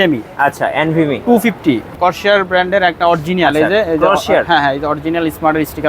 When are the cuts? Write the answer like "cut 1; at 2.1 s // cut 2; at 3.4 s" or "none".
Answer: cut 1; at 2.0 s